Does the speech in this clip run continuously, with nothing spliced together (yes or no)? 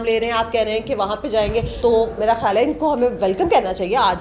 no